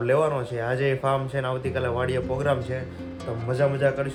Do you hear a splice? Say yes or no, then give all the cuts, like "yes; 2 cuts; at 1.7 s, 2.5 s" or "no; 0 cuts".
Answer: no; 0 cuts